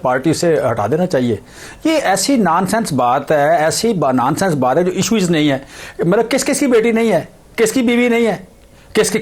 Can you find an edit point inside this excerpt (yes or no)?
no